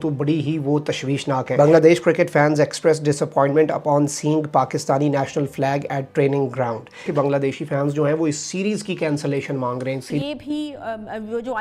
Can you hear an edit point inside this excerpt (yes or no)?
yes